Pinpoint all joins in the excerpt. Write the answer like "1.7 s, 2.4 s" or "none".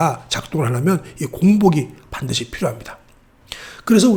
none